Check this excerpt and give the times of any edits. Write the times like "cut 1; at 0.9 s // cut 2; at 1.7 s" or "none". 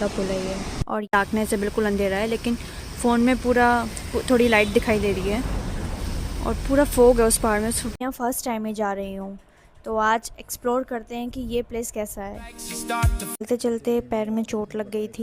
cut 1; at 1.1 s // cut 2; at 7.9 s // cut 3; at 13.4 s

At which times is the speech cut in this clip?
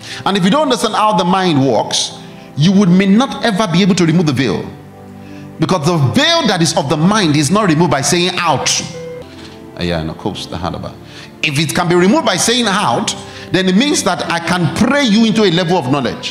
cut 1; at 9.2 s

